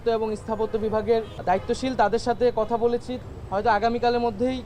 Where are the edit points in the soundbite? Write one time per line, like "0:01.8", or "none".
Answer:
0:01.3
0:03.1